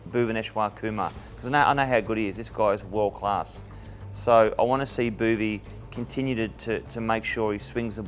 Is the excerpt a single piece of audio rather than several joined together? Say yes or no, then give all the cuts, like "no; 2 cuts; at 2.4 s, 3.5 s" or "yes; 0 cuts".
yes; 0 cuts